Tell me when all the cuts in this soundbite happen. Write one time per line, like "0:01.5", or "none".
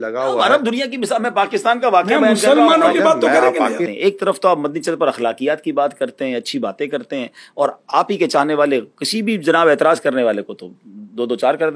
0:03.9

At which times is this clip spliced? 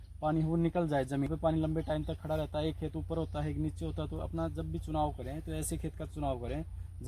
0:01.3

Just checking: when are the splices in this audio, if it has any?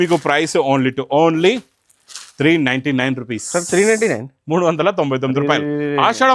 none

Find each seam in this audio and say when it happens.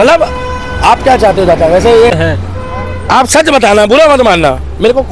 0:02.1

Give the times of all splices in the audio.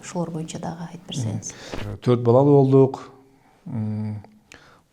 0:01.8

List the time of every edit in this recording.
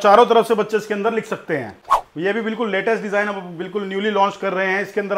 0:01.8

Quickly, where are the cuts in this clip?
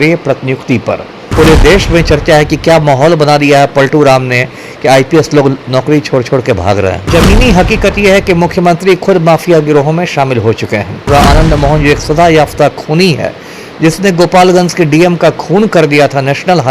0:01.2
0:07.1
0:11.1

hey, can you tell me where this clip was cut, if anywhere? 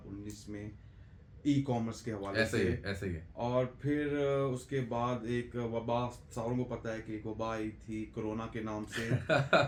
none

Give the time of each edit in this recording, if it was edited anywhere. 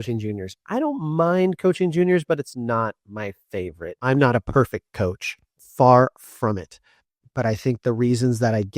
0:03.9

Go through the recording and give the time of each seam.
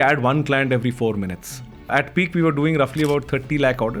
0:01.9

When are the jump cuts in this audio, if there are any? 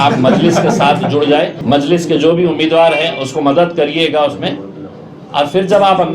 0:01.6

